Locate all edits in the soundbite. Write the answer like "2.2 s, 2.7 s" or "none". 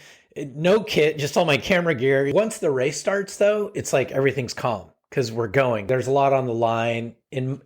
2.3 s, 5.8 s